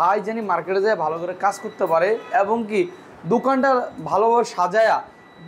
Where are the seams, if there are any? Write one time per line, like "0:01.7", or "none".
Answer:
none